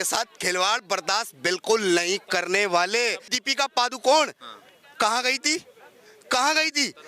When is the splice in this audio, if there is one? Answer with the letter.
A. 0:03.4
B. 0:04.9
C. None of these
A